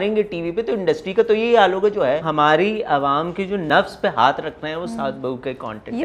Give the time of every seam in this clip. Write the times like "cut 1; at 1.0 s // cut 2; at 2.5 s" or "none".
cut 1; at 2.3 s // cut 2; at 3.6 s